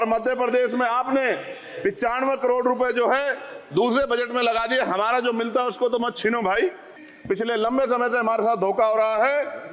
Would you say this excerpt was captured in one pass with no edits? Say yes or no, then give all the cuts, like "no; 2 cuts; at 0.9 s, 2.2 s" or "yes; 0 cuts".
no; 1 cut; at 7.0 s